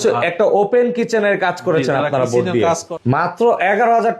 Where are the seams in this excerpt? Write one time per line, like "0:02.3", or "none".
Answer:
0:02.9

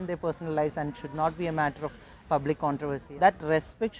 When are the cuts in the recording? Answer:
0:03.0

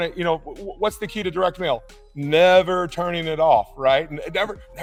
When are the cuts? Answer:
none

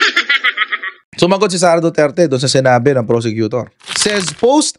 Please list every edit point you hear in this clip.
none

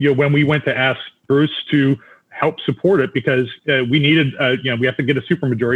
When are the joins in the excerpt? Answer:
0:01.2

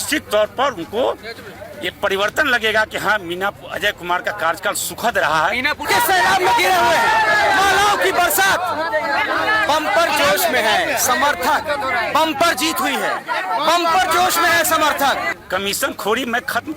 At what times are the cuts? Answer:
0:05.9
0:15.3

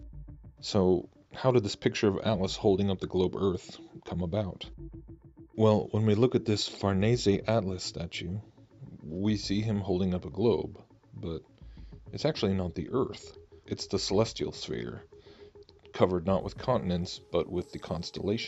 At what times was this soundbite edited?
none

